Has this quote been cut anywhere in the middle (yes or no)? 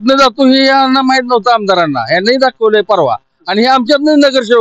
no